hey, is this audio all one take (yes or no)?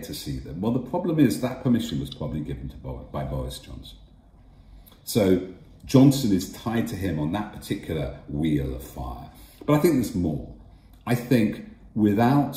yes